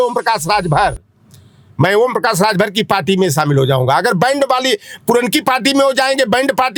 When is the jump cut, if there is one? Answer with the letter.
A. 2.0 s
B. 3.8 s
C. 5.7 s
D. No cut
D